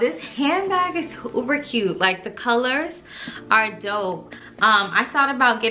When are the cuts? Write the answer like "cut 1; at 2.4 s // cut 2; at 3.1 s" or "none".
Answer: none